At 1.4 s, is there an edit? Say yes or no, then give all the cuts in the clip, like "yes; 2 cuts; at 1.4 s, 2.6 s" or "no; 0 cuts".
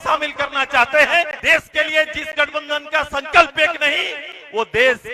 yes; 1 cut; at 1.4 s